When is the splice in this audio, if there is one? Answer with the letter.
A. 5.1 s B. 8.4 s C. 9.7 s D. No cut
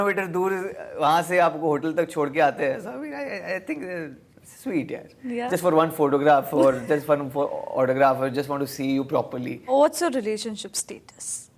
C